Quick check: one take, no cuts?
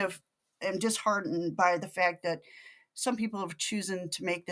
yes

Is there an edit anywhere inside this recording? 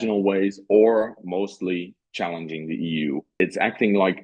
yes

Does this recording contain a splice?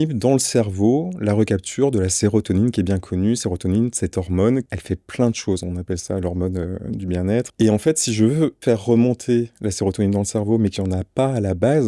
yes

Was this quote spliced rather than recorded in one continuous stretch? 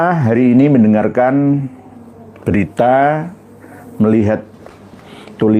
no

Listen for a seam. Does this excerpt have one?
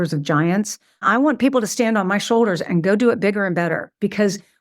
no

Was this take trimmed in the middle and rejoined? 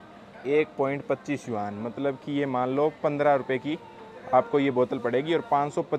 no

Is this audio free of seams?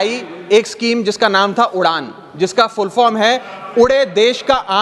yes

